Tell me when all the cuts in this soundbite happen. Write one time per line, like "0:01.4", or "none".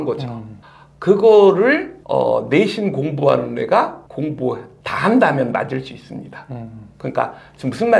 none